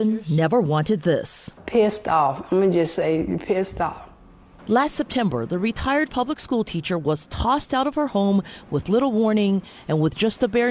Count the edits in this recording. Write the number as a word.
zero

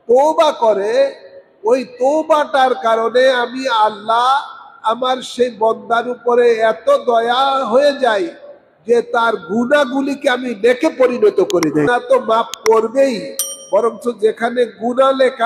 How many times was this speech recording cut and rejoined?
one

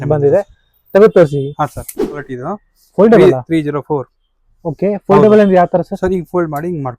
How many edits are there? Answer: one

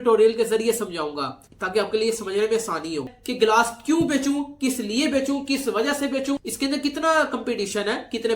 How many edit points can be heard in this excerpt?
one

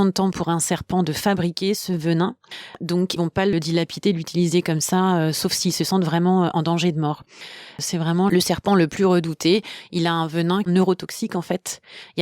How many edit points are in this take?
one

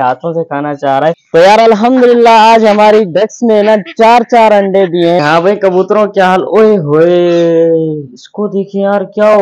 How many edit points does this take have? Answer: two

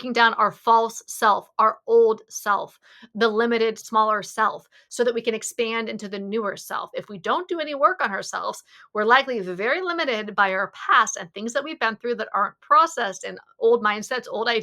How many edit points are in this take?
two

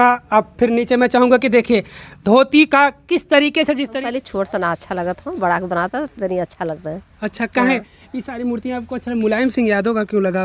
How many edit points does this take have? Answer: one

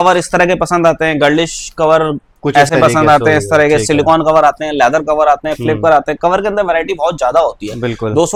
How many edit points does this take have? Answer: zero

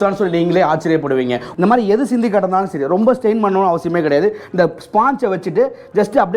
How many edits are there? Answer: one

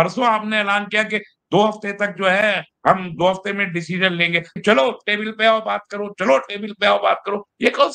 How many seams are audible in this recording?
one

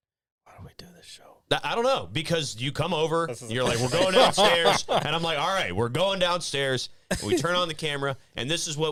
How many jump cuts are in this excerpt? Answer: zero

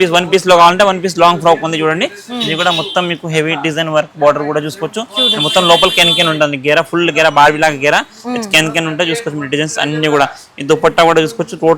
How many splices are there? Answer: zero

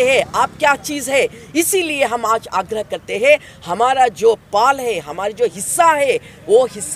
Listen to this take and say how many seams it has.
zero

